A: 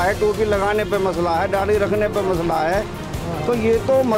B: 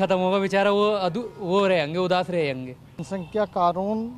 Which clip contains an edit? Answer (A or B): B